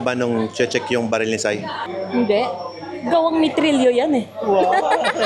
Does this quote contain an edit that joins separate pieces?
no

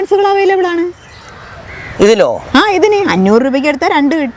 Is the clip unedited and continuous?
yes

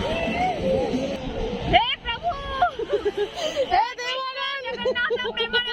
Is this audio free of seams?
no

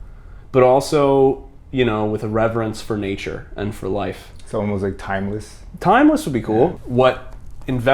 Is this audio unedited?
no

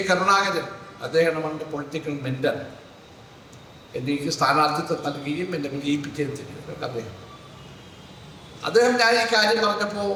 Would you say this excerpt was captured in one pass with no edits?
yes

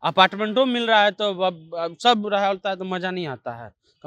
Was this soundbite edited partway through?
no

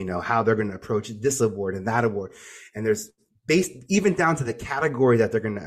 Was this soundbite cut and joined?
no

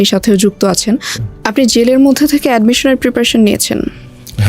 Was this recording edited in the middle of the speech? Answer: yes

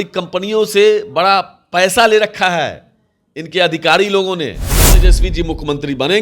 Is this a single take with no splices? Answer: no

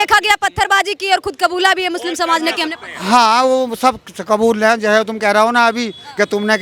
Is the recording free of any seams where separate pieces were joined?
yes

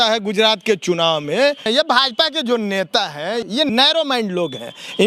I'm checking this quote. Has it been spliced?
yes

